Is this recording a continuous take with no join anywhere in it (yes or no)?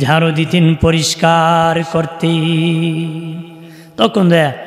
yes